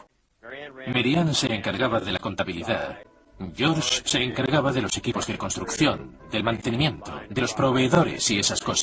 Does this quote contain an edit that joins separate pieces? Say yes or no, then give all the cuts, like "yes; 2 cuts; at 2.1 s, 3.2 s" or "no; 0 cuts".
yes; 1 cut; at 4.9 s